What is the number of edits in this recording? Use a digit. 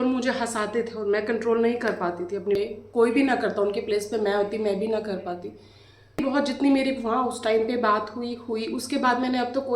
2